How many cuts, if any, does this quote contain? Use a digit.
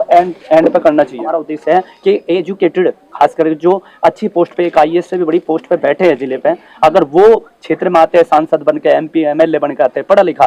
1